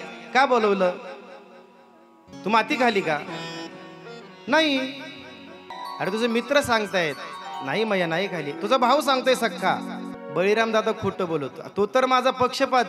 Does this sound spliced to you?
no; 0 cuts

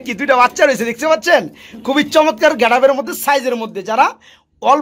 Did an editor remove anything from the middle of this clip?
no; 0 cuts

